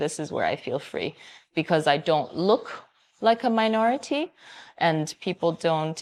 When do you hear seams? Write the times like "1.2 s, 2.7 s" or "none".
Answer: none